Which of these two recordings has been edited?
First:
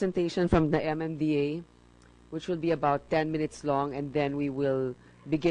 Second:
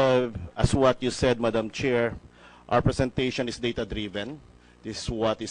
second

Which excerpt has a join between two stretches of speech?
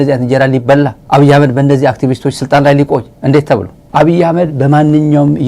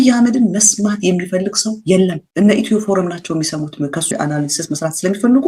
first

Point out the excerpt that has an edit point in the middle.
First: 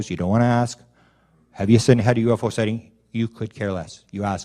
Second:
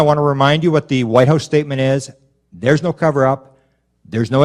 first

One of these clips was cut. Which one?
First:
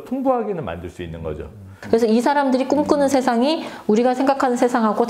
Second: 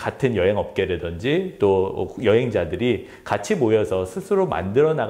first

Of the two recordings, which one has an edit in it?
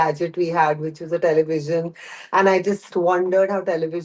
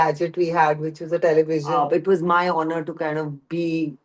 second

